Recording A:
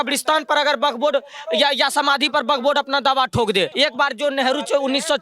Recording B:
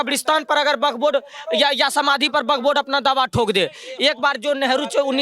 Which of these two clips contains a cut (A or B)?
A